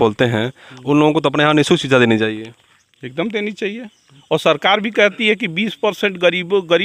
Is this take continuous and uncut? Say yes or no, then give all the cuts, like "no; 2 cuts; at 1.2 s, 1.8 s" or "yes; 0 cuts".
yes; 0 cuts